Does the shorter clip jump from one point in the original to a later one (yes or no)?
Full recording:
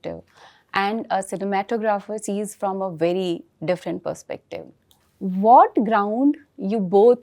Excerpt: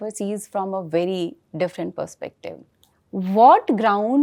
no